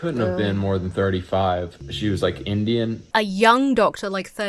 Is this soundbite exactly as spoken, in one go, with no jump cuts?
no; 2 cuts; at 1.9 s, 3.0 s

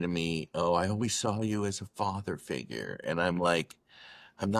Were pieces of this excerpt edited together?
no; 0 cuts

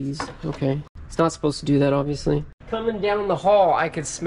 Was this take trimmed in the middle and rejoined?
yes; 2 cuts; at 1.0 s, 2.6 s

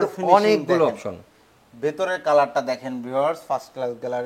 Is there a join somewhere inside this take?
no; 0 cuts

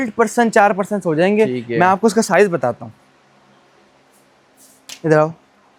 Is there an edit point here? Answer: no; 0 cuts

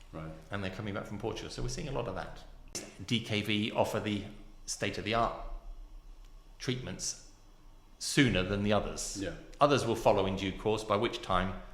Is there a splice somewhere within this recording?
yes; 1 cut; at 2.9 s

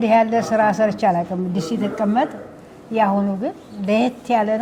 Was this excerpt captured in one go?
yes; 0 cuts

